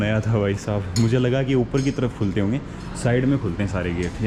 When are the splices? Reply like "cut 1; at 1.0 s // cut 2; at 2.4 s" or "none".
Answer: none

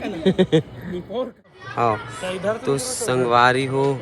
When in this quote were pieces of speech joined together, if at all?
cut 1; at 1.6 s

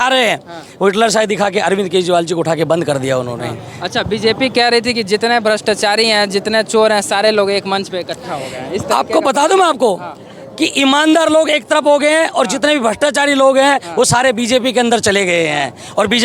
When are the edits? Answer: none

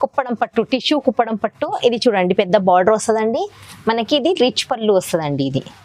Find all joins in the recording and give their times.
none

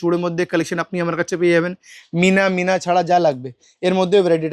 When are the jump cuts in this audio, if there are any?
none

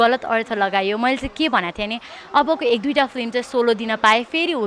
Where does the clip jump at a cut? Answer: none

